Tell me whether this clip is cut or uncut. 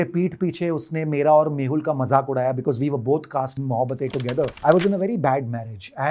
cut